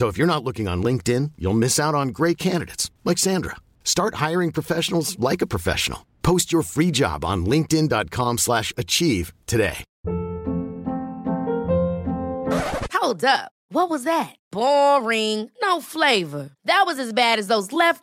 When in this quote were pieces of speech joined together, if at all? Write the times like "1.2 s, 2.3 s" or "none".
9.9 s

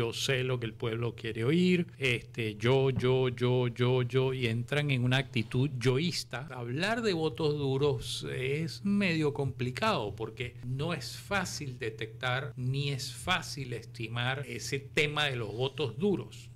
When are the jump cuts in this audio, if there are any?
1.9 s, 6.5 s, 10.6 s, 12.5 s, 14.4 s

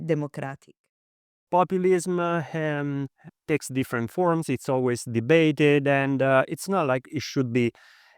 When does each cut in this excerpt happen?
1.4 s

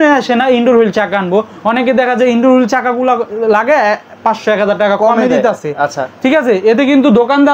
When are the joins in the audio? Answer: none

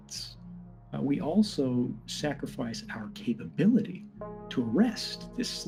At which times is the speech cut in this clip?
none

